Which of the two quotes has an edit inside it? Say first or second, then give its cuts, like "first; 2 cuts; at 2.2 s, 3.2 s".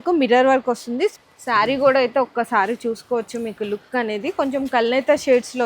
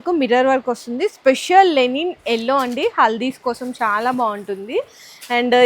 first; 1 cut; at 1.2 s